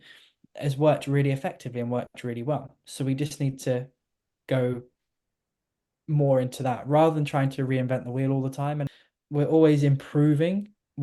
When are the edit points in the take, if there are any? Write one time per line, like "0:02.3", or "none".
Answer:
0:08.8